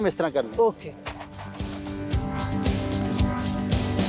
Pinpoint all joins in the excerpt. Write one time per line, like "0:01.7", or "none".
none